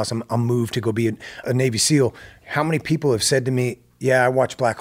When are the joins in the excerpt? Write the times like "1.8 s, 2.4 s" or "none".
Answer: 1.4 s

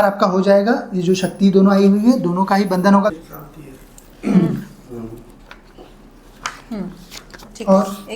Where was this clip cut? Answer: 3.1 s

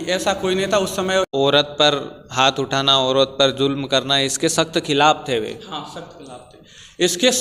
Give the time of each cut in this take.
1.3 s

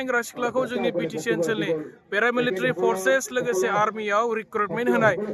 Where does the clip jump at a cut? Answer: none

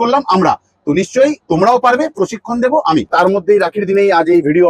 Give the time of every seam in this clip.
3.1 s

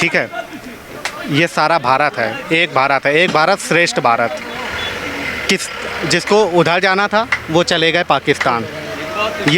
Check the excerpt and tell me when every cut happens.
none

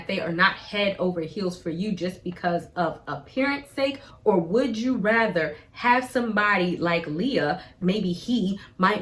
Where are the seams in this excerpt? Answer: 4.1 s, 7.8 s

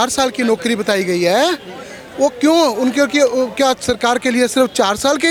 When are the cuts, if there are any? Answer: none

